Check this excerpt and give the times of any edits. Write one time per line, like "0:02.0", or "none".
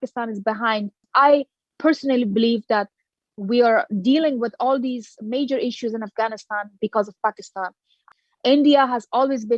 0:01.0
0:08.0